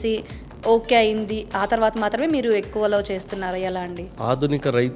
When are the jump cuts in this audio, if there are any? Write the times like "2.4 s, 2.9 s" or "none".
4.0 s